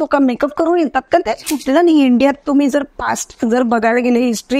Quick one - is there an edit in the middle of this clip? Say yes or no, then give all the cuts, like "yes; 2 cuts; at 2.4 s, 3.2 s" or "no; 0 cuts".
yes; 1 cut; at 1.5 s